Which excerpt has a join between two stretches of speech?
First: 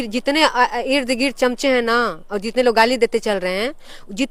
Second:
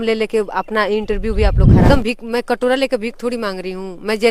second; 1 cut; at 1.9 s

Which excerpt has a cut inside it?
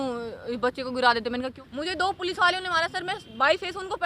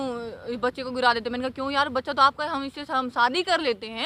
first; 1 cut; at 1.5 s

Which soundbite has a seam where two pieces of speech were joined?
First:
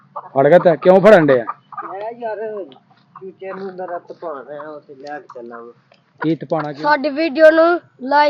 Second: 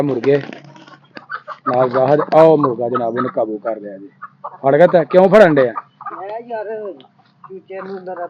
first; 1 cut; at 6.6 s

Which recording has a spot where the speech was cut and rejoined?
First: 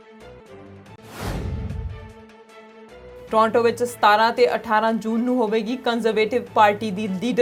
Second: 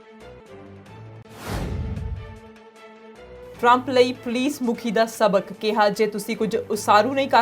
second; 2 cuts; at 1.0 s, 3.4 s

